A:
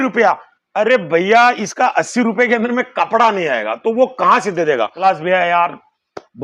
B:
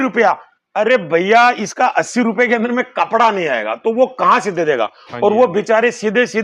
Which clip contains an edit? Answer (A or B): A